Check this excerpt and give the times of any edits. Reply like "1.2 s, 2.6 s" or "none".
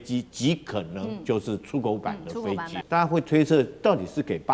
2.8 s